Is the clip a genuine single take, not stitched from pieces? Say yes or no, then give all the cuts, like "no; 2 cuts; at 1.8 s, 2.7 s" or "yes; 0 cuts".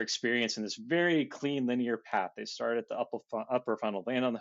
yes; 0 cuts